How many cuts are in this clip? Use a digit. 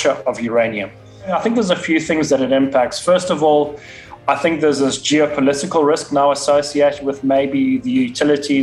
1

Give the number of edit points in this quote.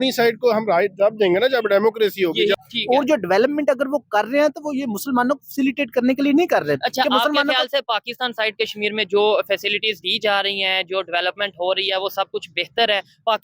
1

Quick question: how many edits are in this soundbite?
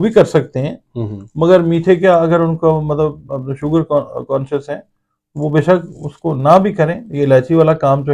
0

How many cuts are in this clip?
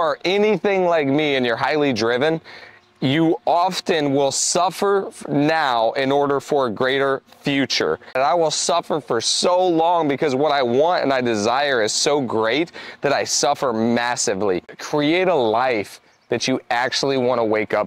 2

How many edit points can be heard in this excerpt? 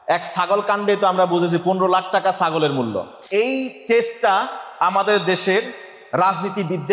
1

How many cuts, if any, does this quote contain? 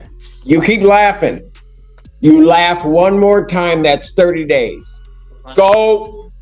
0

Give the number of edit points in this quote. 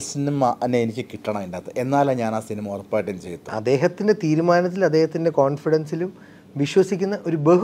1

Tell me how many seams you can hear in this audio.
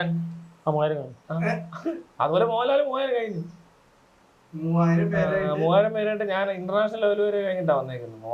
0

